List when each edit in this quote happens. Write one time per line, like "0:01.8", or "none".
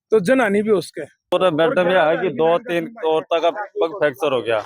0:01.3